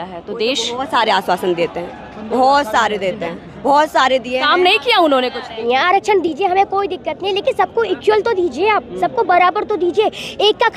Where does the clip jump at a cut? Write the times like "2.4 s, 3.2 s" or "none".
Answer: 5.6 s